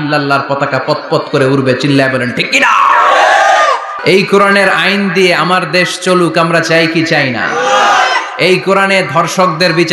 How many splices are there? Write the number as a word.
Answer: one